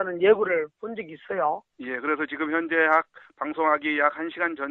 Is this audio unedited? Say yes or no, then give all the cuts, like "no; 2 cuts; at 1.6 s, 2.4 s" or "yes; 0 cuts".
yes; 0 cuts